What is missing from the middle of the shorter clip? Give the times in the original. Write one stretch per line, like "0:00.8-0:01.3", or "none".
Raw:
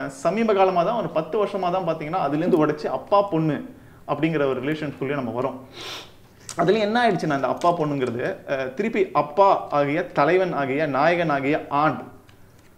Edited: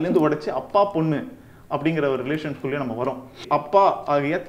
0:05.8-0:09.1